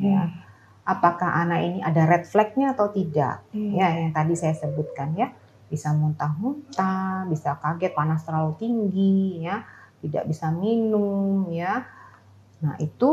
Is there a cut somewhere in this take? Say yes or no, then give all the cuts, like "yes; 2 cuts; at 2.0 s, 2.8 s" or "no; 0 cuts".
no; 0 cuts